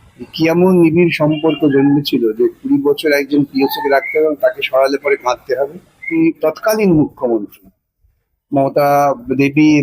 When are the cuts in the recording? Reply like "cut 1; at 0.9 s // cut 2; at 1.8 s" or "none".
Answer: cut 1; at 6.0 s